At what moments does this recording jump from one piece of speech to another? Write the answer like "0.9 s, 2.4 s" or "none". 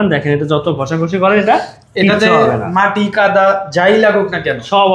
none